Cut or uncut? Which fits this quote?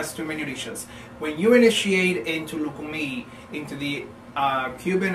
cut